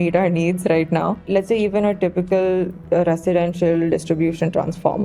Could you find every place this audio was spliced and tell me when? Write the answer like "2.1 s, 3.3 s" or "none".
1.3 s